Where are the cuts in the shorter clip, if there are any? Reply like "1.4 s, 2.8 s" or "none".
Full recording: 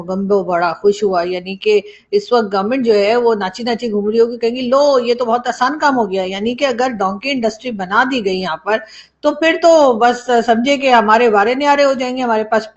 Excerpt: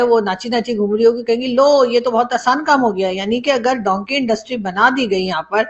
none

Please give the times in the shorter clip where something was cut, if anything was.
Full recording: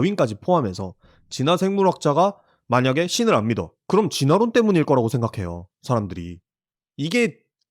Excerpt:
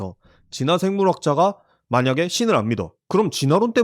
none

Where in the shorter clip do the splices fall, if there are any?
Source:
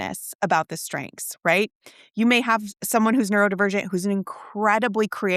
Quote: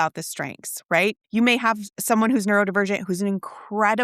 1.2 s

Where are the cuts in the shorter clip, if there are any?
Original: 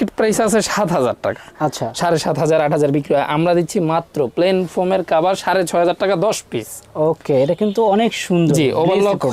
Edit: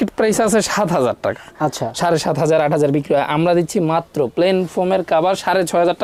none

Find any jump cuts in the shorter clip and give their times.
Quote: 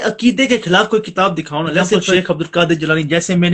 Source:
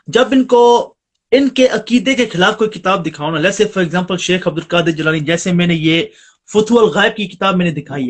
2.1 s

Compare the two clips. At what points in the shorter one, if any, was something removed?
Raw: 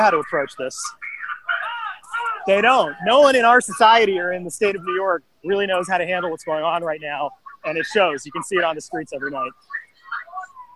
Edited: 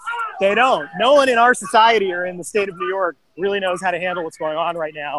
none

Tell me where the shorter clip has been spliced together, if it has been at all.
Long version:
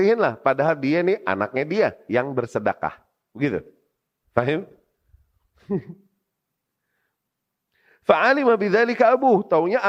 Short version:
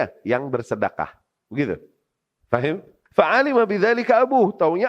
3.0 s

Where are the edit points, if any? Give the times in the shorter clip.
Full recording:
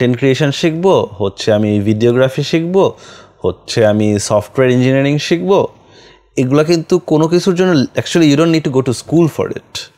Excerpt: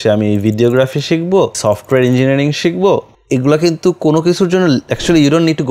1.6 s, 3.1 s

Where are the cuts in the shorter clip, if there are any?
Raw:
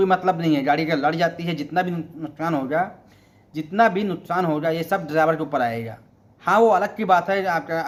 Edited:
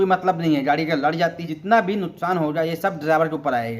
1.4 s

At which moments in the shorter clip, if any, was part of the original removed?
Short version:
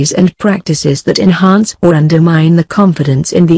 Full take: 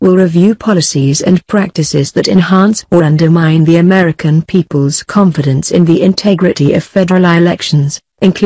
2.5 s

